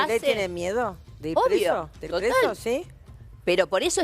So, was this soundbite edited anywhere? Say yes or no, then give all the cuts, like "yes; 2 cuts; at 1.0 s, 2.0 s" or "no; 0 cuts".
no; 0 cuts